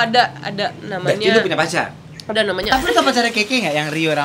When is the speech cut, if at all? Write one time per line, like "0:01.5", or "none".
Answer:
0:02.7